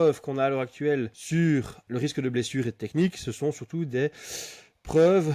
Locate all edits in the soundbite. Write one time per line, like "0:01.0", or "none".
0:01.2
0:01.8